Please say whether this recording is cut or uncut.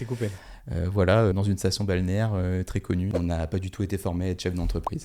cut